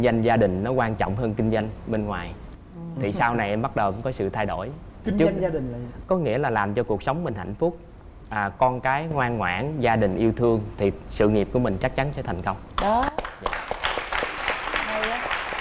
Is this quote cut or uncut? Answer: uncut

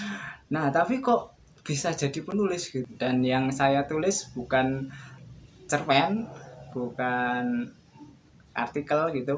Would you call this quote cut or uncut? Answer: cut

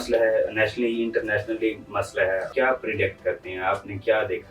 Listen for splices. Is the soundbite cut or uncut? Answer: cut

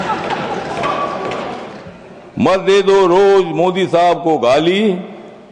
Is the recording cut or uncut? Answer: cut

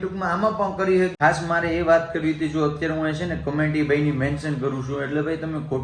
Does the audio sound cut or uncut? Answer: cut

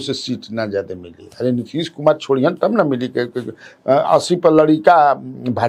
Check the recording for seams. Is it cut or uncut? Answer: uncut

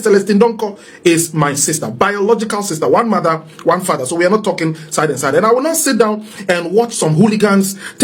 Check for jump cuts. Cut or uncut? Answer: uncut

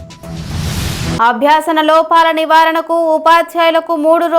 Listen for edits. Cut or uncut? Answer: cut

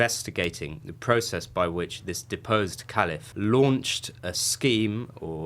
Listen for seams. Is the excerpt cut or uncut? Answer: cut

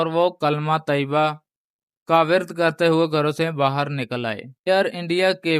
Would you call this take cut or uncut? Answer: cut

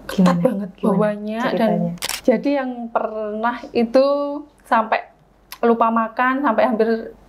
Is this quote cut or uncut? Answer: cut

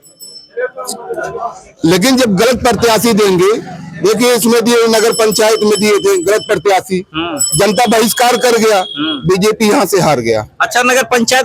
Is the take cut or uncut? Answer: uncut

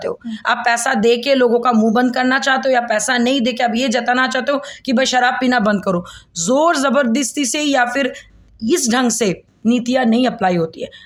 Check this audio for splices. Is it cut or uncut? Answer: uncut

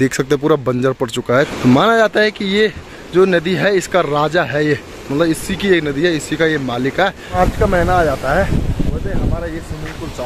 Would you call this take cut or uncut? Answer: cut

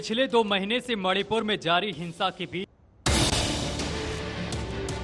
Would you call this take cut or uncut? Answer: cut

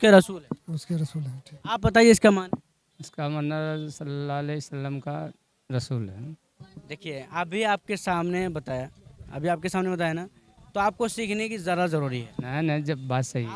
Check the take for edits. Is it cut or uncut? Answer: uncut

